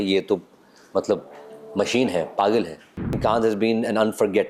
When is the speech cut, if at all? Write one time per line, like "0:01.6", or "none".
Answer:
0:03.2